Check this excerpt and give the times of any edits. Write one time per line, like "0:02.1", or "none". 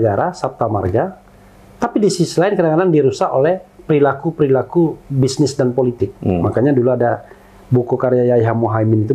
none